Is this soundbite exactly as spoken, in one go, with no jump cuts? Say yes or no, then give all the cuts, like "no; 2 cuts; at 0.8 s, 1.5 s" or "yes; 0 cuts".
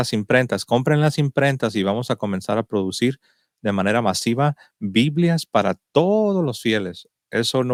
yes; 0 cuts